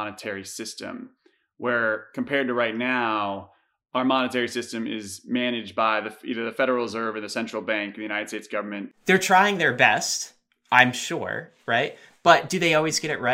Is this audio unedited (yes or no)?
no